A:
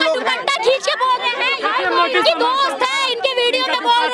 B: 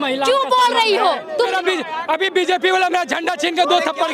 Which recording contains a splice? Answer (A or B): B